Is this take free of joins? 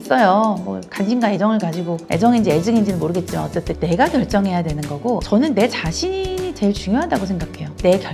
no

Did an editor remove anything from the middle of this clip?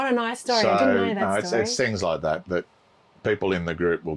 no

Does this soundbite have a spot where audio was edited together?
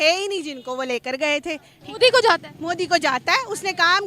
yes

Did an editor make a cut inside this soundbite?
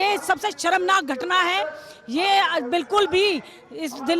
no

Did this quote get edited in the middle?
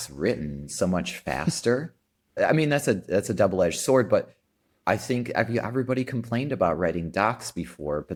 no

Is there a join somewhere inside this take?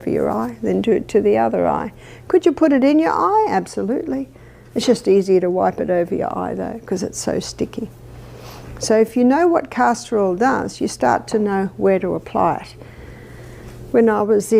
yes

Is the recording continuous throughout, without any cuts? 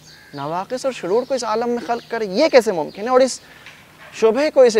yes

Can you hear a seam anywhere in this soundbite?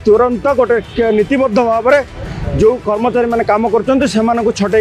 no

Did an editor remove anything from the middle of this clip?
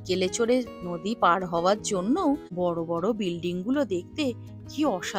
yes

